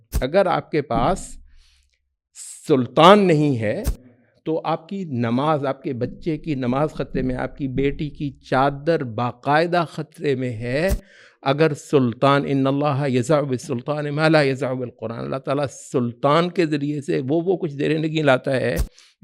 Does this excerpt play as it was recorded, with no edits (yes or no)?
yes